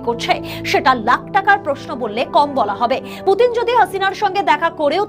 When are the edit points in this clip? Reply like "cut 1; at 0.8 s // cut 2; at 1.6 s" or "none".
cut 1; at 3.1 s